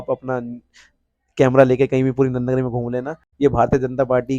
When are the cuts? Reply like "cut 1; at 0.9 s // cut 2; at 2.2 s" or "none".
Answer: cut 1; at 3.3 s